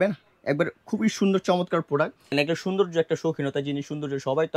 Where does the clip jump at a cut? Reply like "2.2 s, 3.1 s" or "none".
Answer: 2.2 s